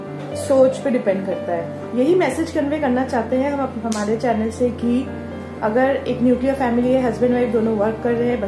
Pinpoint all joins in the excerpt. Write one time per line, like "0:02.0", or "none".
0:01.8